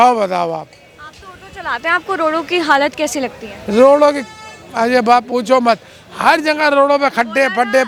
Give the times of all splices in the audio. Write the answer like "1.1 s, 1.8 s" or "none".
none